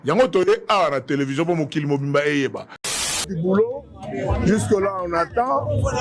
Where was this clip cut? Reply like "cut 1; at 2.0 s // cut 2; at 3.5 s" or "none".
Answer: cut 1; at 2.9 s

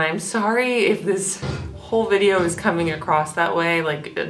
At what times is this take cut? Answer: none

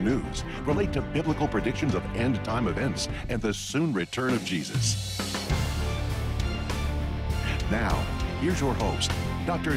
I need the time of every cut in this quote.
cut 1; at 5.7 s

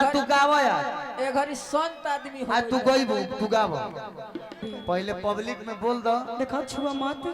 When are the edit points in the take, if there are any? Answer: cut 1; at 4.6 s

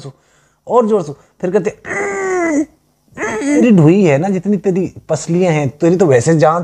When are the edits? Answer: cut 1; at 3.6 s

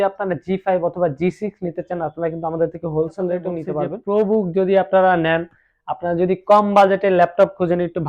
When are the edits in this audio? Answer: cut 1; at 3.9 s

